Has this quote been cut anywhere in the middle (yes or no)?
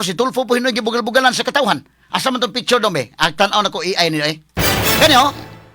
no